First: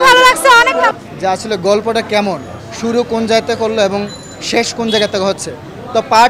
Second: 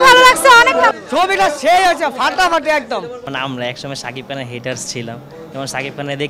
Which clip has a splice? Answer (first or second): second